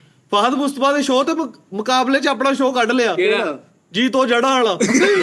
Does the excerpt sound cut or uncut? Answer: uncut